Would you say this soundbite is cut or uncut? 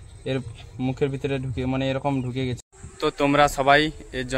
cut